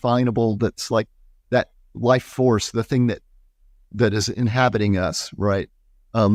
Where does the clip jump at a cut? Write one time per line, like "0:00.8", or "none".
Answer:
none